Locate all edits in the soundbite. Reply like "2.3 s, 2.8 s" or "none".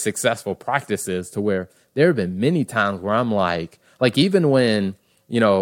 none